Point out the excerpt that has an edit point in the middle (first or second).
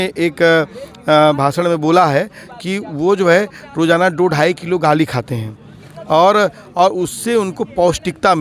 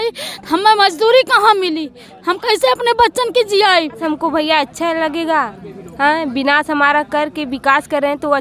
second